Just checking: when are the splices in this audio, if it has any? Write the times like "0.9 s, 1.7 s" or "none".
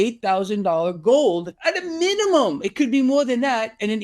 1.5 s